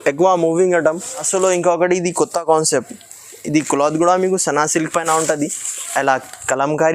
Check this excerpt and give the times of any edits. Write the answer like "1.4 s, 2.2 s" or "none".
1.3 s